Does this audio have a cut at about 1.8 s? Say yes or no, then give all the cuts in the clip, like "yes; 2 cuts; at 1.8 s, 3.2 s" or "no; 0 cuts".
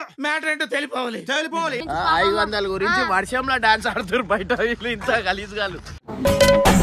yes; 1 cut; at 1.8 s